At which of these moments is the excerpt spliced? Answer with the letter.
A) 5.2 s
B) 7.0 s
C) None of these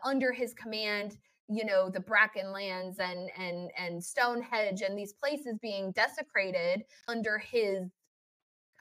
B